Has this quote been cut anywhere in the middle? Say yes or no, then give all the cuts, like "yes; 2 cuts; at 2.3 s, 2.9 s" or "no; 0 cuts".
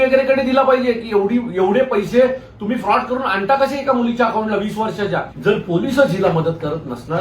yes; 1 cut; at 5.3 s